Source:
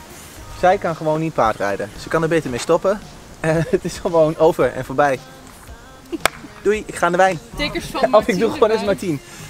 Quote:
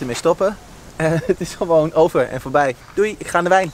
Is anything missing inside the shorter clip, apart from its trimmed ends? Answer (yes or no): yes